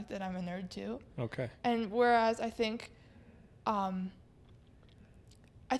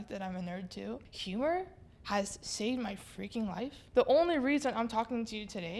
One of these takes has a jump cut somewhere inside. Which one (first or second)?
second